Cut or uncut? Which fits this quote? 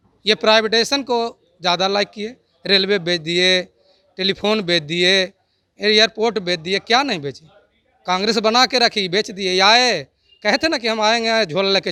uncut